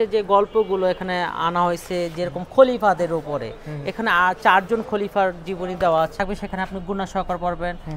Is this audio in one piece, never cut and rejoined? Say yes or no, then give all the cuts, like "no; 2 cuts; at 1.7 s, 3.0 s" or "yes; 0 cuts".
no; 1 cut; at 6.1 s